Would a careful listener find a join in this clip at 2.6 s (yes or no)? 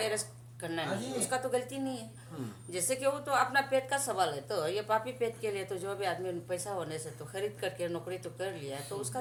no